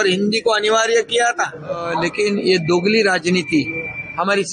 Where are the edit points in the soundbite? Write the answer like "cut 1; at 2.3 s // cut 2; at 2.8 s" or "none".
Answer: cut 1; at 2.0 s